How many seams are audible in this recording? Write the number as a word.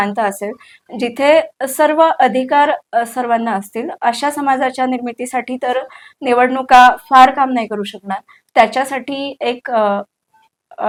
zero